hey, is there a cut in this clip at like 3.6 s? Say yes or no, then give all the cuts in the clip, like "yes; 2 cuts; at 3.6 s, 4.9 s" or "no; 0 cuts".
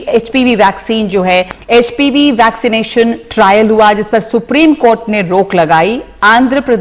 no; 1 cut; at 1.6 s